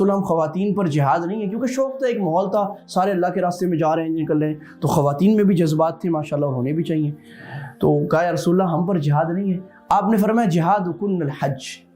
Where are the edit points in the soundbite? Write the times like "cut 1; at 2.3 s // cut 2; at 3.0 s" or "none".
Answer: none